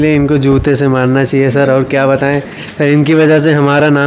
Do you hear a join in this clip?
no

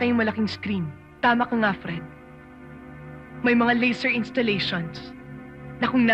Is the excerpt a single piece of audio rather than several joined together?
no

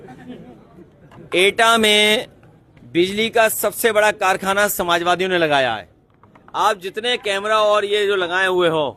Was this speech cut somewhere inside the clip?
no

